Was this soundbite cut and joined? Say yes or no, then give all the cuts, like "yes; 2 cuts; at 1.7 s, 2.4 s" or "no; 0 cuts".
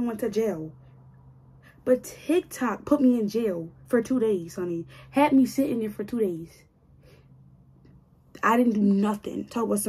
no; 0 cuts